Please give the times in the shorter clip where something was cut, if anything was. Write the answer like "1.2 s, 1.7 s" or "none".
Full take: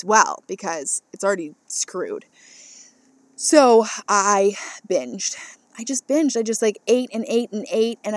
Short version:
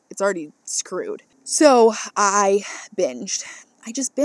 1.4 s